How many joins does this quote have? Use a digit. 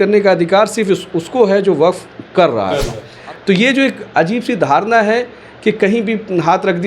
1